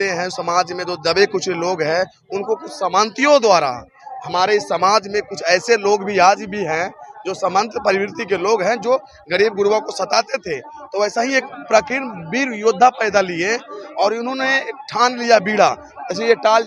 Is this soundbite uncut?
yes; 0 cuts

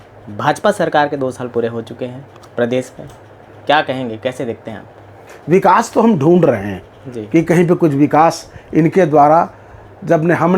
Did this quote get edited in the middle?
yes; 1 cut; at 5.3 s

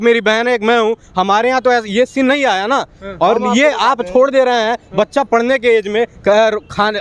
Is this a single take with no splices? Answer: yes; 0 cuts

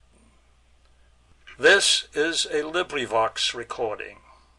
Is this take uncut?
no; 1 cut; at 1.3 s

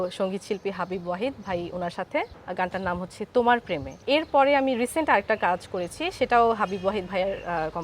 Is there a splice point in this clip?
yes; 2 cuts; at 2.4 s, 4.0 s

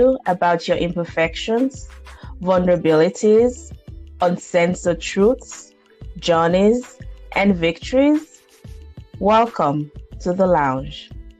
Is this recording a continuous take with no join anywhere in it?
yes; 0 cuts

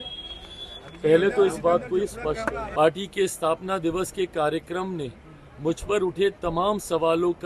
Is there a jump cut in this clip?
yes; 1 cut; at 2.6 s

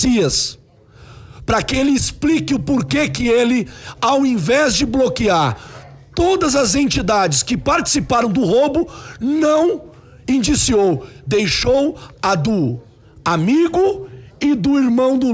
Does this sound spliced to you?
no; 0 cuts

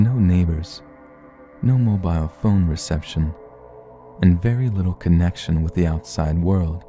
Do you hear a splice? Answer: yes; 1 cut; at 4.3 s

